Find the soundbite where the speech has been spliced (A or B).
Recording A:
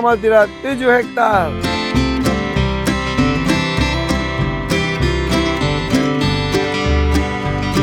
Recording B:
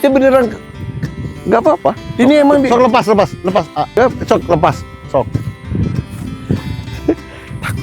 B